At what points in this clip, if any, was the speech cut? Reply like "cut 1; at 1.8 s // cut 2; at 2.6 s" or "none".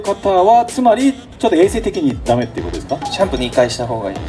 none

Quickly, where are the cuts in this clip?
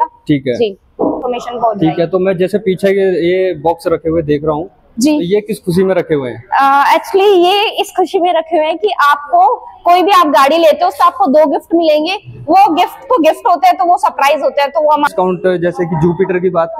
cut 1; at 1.2 s // cut 2; at 15.1 s

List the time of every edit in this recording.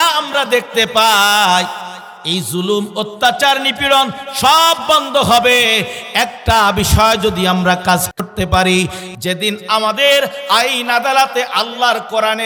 none

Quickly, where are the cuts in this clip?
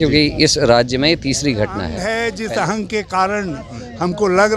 cut 1; at 2.0 s

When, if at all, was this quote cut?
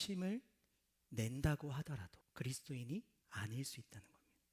cut 1; at 2.2 s // cut 2; at 3.2 s

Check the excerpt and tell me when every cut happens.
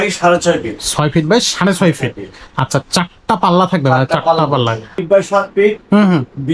cut 1; at 5.0 s

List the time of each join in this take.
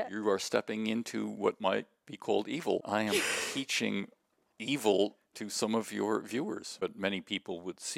cut 1; at 2.8 s // cut 2; at 6.7 s

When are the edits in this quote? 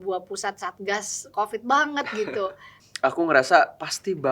cut 1; at 2.7 s

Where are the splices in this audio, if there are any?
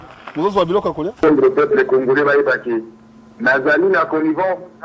cut 1; at 1.2 s

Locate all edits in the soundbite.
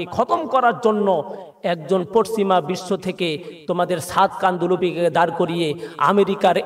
none

